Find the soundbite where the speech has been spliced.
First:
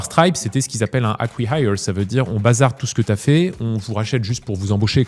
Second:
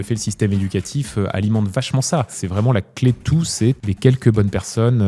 second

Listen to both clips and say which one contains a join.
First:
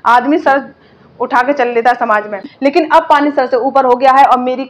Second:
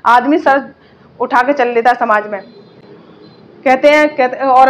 first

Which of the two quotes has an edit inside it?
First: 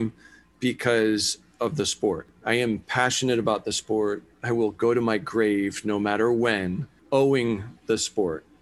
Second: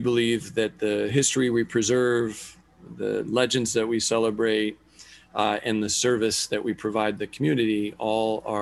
first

